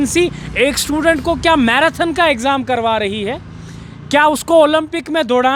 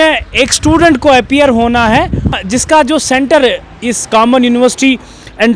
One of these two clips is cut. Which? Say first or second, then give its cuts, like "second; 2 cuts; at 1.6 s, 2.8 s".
second; 1 cut; at 2.3 s